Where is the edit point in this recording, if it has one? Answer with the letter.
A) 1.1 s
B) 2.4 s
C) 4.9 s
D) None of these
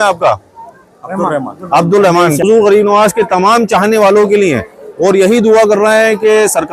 B